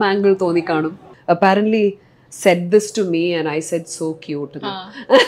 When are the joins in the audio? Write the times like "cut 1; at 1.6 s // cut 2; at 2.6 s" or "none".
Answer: cut 1; at 1.0 s